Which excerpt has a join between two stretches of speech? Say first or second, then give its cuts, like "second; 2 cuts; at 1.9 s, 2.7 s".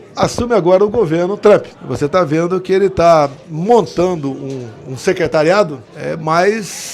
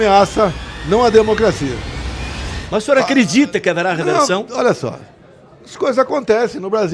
first; 2 cuts; at 1.8 s, 5.9 s